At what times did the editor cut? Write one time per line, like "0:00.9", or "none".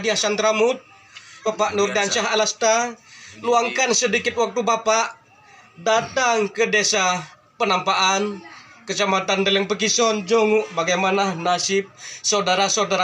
0:01.4